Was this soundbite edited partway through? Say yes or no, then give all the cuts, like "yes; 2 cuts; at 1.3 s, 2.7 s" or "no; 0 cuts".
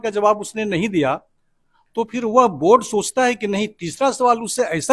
no; 0 cuts